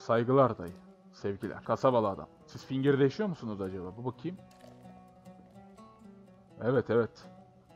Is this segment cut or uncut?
cut